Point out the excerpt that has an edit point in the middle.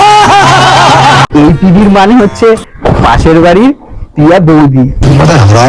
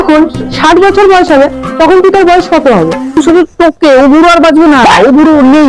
first; 1 cut; at 1.2 s

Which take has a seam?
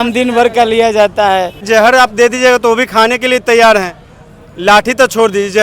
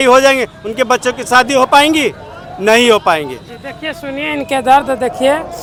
first; 1 cut; at 1.6 s

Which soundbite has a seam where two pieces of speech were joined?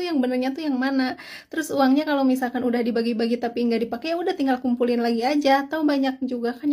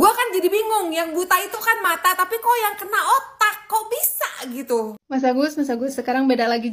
second; 1 cut; at 5.0 s

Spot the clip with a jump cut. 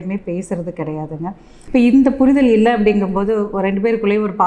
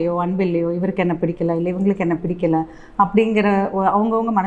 first; 1 cut; at 1.5 s

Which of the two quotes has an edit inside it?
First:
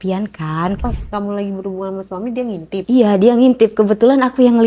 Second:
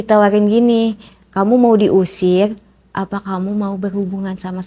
first; 2 cuts; at 0.8 s, 2.8 s

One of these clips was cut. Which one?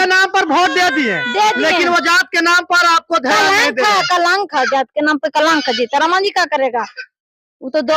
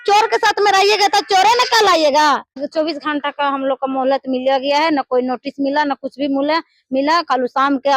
second; 1 cut; at 2.6 s

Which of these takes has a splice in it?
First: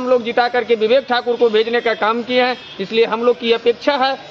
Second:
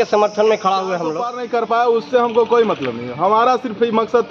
second; 1 cut; at 1.3 s

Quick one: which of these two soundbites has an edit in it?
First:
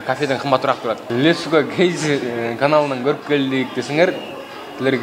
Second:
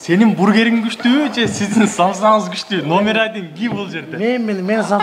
first; 1 cut; at 1.0 s

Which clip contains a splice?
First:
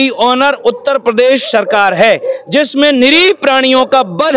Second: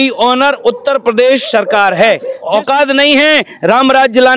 second; 1 cut; at 2.3 s

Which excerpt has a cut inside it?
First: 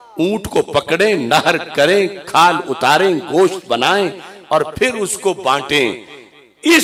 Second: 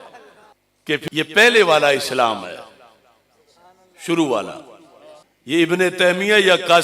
second; 1 cut; at 1.0 s

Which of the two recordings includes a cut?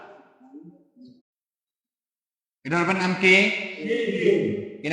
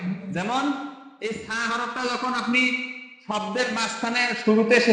first; 1 cut; at 1.3 s

